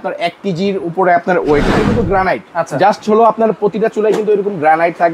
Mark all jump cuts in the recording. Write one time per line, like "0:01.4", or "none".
0:01.7